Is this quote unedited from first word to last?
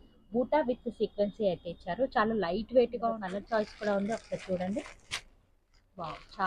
no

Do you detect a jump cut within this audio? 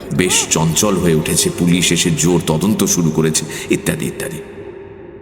no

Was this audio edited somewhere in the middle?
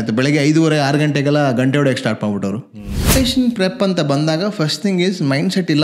yes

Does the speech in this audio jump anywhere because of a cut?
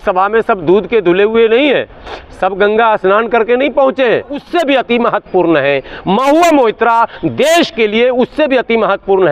yes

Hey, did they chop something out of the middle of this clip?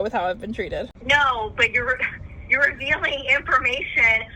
yes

